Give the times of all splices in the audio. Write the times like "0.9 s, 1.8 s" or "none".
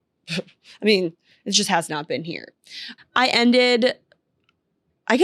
2.8 s